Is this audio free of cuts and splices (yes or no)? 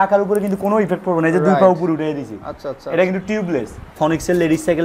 no